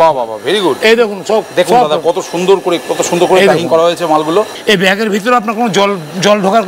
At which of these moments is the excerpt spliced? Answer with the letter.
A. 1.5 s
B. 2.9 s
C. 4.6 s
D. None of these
C